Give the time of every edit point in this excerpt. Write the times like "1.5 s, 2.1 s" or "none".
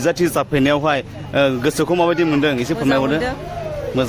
none